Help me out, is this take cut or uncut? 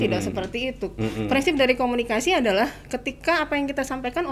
uncut